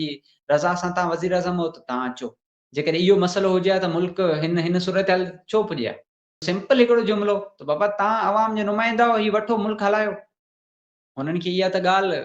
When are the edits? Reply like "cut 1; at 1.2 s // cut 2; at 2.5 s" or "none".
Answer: cut 1; at 6.4 s